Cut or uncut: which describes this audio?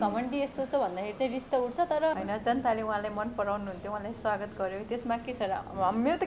cut